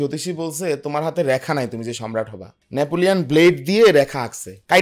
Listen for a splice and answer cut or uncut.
uncut